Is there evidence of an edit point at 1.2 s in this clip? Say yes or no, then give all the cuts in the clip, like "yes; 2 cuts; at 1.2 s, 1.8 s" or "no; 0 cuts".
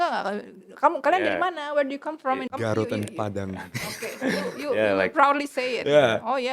no; 1 cut; at 2.4 s